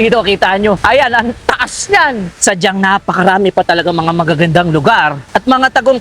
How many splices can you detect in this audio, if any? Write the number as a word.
three